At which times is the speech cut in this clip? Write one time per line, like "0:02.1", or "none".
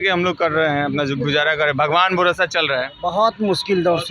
0:02.9